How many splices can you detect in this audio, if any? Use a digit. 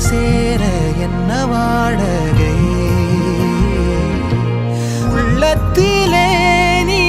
1